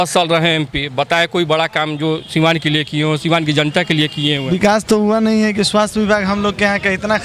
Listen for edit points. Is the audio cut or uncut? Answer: cut